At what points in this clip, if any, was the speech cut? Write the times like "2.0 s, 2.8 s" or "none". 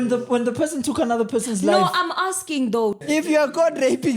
3.1 s